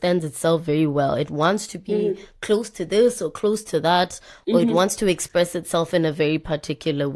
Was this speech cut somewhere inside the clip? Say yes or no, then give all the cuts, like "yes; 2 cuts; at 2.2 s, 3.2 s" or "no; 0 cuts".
no; 0 cuts